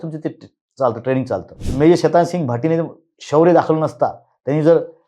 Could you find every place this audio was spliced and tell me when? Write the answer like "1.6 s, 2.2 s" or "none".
1.6 s